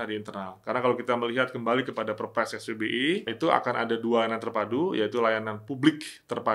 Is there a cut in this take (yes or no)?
yes